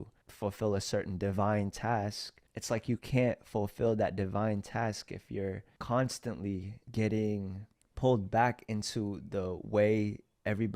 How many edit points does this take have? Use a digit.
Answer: 1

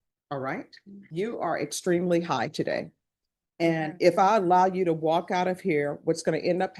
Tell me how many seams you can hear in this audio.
1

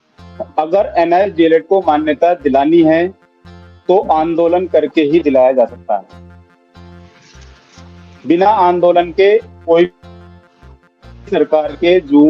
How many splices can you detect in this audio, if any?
0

